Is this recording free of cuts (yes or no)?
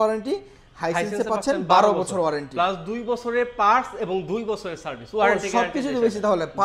yes